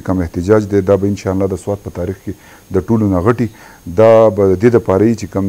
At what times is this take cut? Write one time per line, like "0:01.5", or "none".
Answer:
none